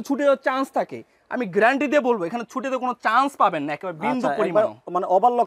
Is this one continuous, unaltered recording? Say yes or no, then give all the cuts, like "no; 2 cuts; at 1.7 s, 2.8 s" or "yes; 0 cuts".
yes; 0 cuts